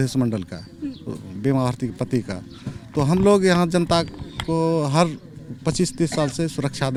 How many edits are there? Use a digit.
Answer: 0